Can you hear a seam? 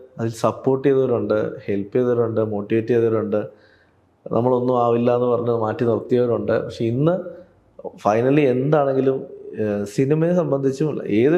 no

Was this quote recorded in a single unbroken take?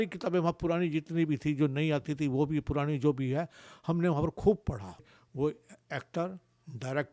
no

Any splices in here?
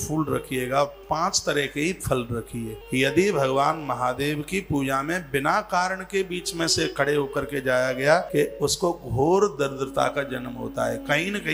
yes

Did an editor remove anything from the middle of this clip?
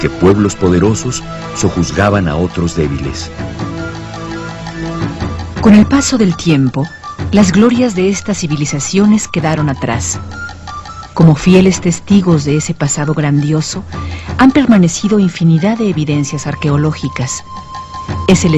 yes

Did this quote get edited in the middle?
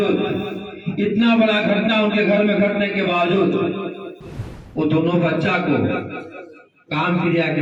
no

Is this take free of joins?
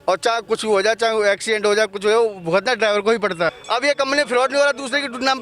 no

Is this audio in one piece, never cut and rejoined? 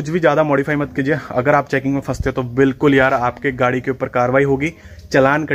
yes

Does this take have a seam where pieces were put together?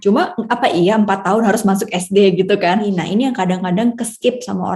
yes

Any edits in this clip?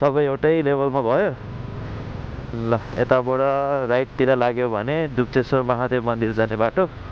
yes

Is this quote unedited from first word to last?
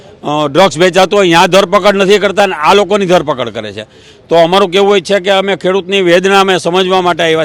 yes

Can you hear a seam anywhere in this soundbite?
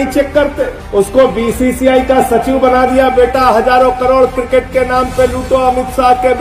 no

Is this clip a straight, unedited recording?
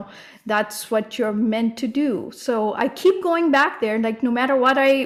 yes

